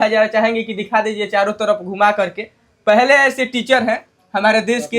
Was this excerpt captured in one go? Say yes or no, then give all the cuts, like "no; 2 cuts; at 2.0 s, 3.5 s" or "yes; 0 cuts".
yes; 0 cuts